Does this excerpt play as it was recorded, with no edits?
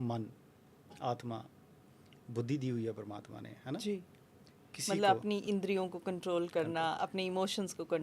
no; 1 cut; at 4.7 s

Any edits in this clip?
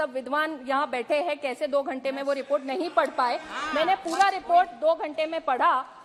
no; 0 cuts

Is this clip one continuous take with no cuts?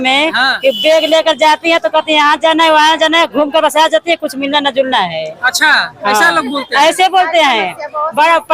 yes; 0 cuts

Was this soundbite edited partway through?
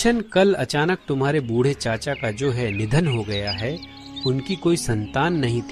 no; 0 cuts

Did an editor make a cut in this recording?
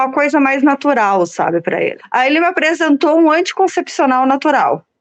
yes; 1 cut; at 2.0 s

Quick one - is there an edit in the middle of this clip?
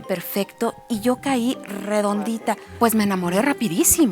yes; 1 cut; at 2.7 s

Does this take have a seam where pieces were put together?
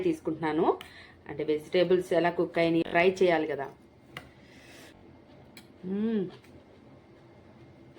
yes; 2 cuts; at 2.8 s, 5.0 s

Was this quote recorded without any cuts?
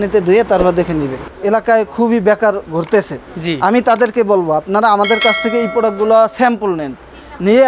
no; 1 cut; at 1.3 s

